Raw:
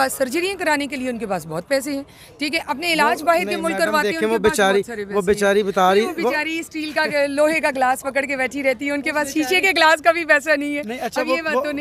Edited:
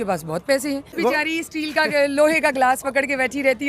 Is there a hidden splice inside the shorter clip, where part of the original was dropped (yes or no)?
yes